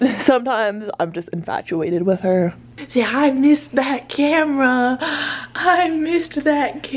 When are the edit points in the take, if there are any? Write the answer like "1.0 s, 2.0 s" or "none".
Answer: 2.7 s